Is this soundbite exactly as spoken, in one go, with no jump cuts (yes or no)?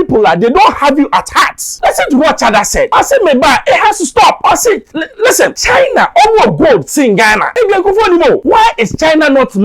no